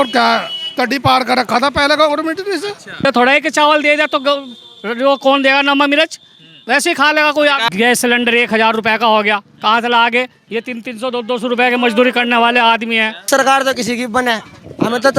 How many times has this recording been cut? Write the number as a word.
three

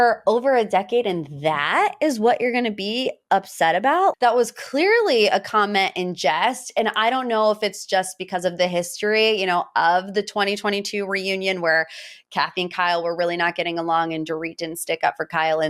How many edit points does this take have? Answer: one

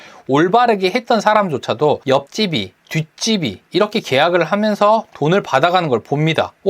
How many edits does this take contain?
two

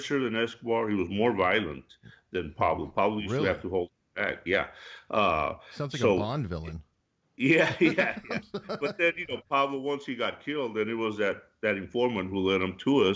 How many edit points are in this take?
zero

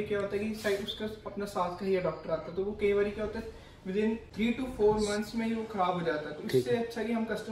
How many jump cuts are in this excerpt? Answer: one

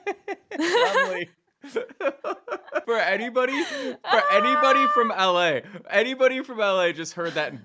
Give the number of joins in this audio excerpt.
one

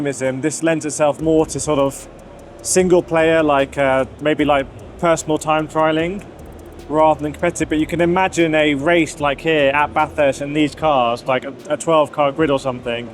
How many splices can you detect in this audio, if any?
zero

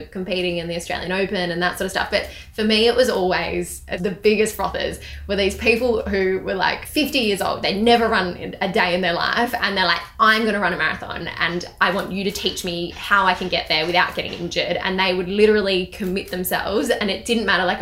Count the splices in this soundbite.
two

